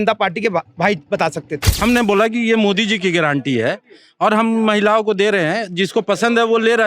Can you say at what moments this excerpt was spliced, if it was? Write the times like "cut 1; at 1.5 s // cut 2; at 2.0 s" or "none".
cut 1; at 1.6 s